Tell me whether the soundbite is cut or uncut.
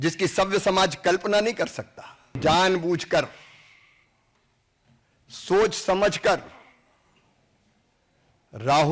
cut